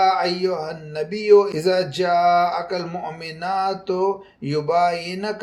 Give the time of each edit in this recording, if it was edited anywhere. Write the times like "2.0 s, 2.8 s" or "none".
none